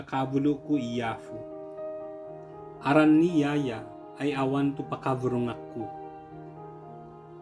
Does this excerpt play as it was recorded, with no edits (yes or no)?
no